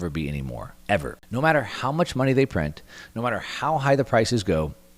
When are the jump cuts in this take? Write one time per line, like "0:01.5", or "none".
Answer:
0:01.2